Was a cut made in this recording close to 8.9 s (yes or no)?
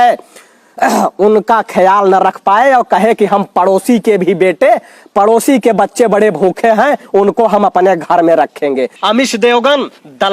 yes